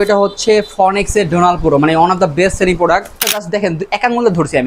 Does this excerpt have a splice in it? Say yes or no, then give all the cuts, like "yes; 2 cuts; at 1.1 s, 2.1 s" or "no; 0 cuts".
yes; 1 cut; at 3.4 s